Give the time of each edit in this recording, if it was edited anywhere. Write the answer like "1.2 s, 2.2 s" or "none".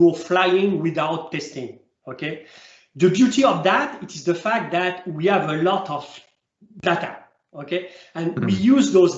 none